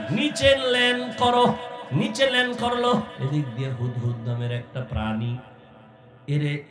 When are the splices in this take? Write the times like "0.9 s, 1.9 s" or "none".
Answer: 1.8 s, 3.1 s